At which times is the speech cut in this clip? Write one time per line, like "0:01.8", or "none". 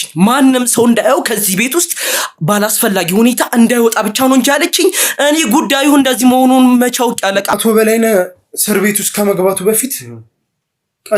0:07.6